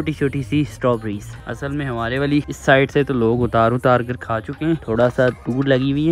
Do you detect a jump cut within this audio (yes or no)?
no